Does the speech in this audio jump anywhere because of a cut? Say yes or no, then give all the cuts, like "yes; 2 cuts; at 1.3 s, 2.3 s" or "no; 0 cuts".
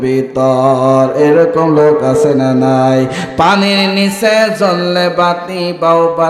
no; 0 cuts